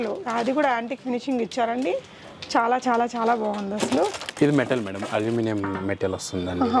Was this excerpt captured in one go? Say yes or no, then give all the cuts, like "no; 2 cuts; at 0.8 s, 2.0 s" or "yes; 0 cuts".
no; 1 cut; at 4.3 s